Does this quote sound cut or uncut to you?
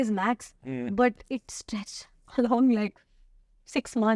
uncut